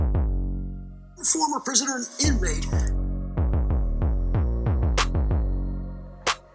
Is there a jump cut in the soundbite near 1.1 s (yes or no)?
yes